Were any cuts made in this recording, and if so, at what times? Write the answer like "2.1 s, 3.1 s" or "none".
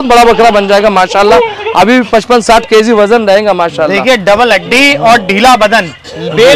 none